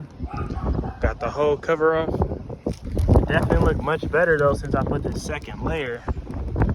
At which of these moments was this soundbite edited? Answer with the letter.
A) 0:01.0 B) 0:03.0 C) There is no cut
B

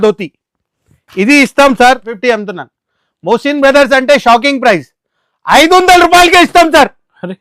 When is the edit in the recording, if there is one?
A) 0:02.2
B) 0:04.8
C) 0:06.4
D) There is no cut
A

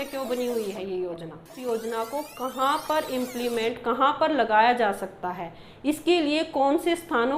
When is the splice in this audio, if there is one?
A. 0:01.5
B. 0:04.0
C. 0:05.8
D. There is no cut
A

